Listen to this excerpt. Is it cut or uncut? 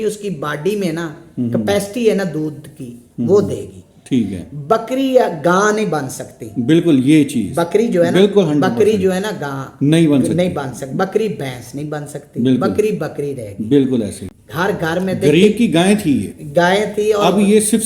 cut